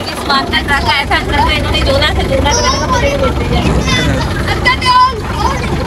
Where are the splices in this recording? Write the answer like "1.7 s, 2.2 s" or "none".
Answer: none